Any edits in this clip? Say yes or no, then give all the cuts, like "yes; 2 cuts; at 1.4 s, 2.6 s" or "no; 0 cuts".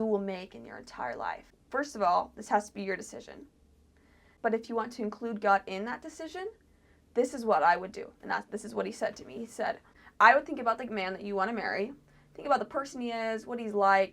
yes; 3 cuts; at 1.5 s, 4.2 s, 10.0 s